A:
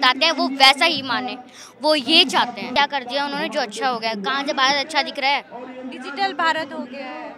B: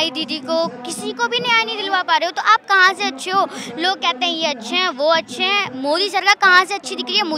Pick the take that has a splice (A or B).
A